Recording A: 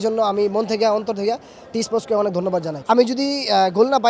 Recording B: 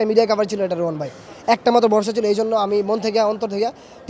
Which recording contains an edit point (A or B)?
A